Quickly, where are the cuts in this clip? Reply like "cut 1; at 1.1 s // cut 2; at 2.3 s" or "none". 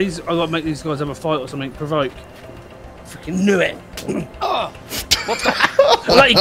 none